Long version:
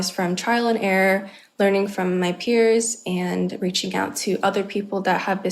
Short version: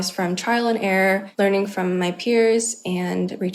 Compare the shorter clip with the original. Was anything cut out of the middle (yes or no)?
yes